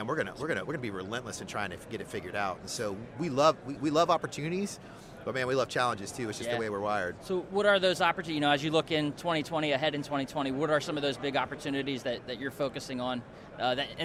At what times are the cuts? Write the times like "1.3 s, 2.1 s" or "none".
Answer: none